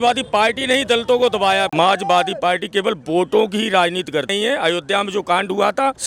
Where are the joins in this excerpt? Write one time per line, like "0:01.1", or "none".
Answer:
0:01.7
0:04.3

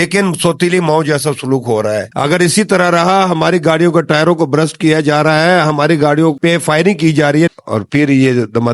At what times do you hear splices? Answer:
0:02.1
0:07.5

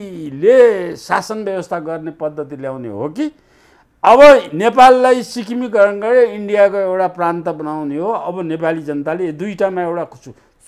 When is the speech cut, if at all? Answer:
none

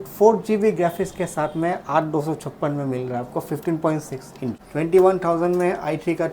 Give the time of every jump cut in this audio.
0:04.6

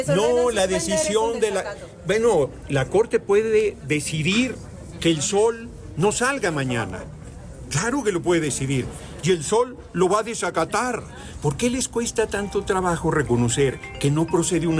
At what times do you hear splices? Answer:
0:11.2

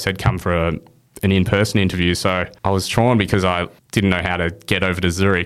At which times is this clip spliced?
0:02.5
0:03.8

